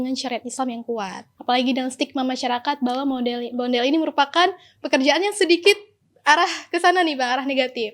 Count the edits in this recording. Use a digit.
1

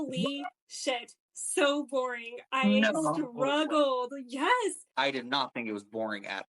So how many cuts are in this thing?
1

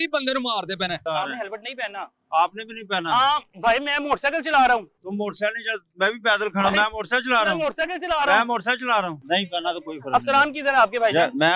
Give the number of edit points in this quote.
2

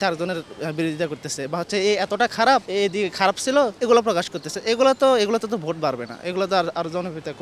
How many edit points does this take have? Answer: 2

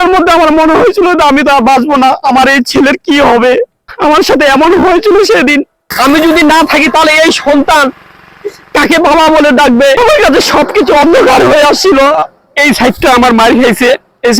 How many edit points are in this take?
3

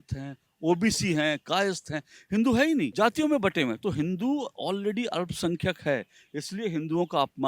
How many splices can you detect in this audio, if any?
1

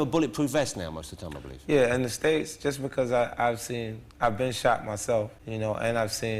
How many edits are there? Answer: 1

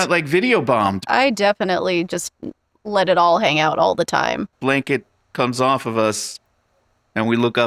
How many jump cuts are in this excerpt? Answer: 2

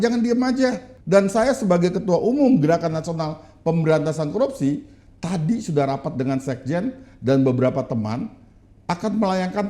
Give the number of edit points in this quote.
1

